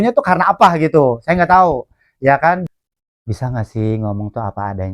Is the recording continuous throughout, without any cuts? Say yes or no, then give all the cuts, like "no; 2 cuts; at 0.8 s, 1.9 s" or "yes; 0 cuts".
no; 1 cut; at 2.6 s